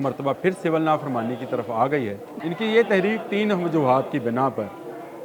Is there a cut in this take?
yes; 1 cut; at 2.3 s

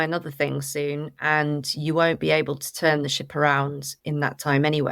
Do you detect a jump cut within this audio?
yes; 1 cut; at 3.9 s

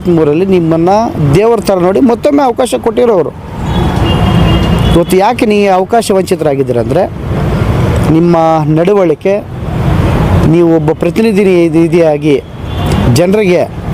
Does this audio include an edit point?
no; 0 cuts

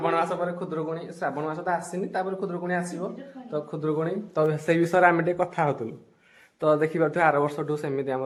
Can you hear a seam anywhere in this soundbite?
no; 0 cuts

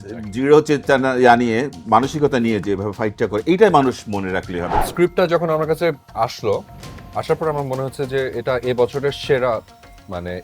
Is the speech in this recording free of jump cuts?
no; 1 cut; at 4.8 s

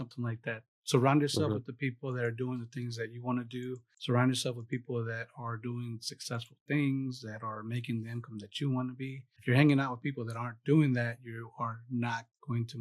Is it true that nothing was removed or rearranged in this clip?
no; 1 cut; at 3.9 s

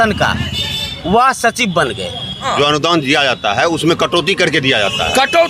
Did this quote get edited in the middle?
yes; 1 cut; at 2.5 s

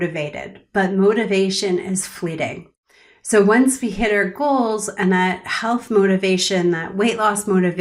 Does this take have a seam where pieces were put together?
no; 0 cuts

